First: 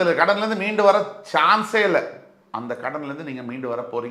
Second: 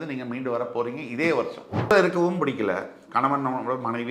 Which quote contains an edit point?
second; 1 cut; at 1.9 s

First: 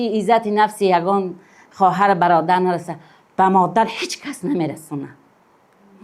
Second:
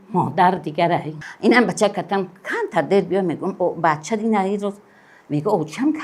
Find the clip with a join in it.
second; 1 cut; at 1.2 s

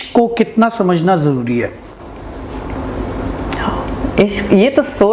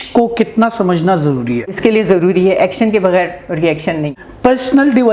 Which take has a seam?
second; 2 cuts; at 1.8 s, 4.1 s

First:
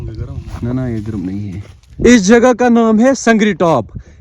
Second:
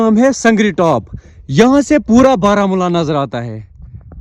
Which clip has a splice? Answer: first; 1 cut; at 1.9 s

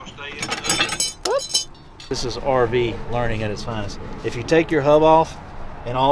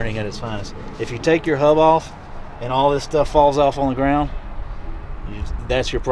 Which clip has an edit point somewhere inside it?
first; 1 cut; at 2.1 s

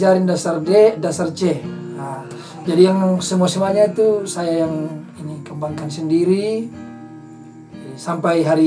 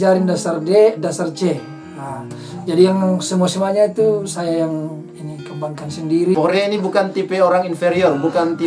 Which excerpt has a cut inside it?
second; 1 cut; at 6.3 s

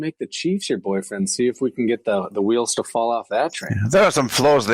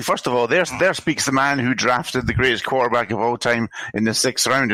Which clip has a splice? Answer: first; 1 cut; at 3.7 s

